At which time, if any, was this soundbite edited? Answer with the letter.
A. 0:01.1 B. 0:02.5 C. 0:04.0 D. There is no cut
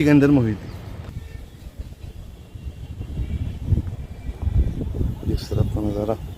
A